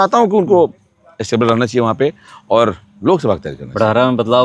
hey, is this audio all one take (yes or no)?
yes